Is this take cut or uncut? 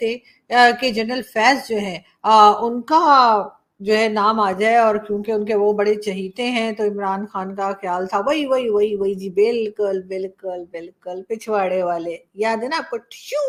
uncut